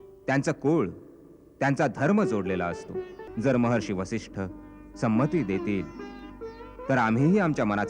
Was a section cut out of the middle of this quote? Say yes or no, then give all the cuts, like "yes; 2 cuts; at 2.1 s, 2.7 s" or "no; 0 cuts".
yes; 1 cut; at 3.2 s